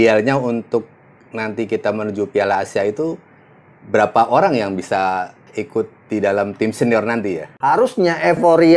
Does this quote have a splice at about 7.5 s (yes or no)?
yes